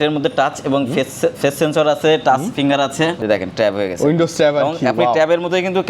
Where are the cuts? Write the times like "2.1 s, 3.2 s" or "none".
3.2 s